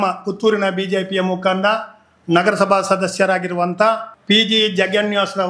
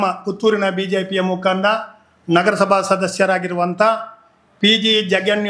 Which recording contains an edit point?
first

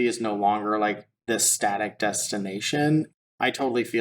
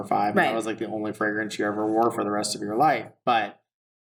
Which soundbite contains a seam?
first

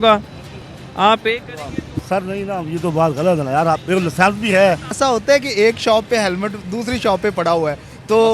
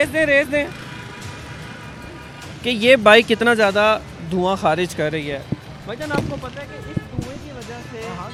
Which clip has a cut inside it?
first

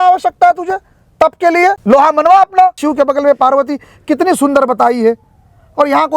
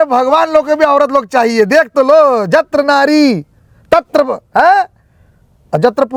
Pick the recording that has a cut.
first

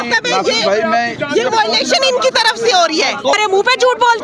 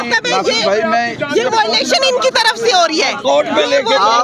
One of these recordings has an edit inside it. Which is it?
first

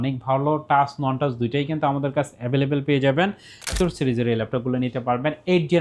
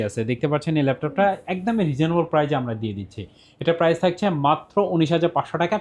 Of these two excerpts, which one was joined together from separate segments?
first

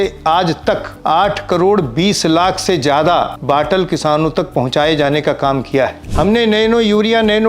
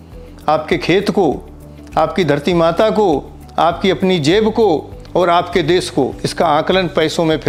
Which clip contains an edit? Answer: first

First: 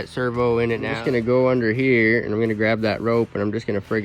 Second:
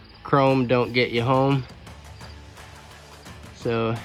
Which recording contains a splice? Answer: first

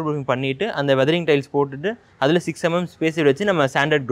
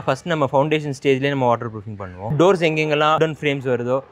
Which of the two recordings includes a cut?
second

